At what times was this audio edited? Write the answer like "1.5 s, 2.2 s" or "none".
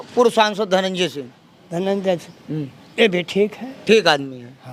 none